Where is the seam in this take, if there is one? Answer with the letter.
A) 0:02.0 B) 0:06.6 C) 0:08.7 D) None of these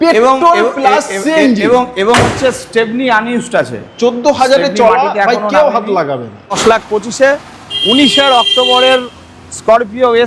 B